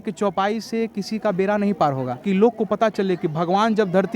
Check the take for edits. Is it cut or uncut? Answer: cut